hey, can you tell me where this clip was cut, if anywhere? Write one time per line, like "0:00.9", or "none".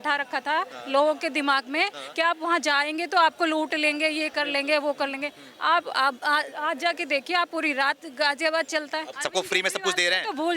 0:09.1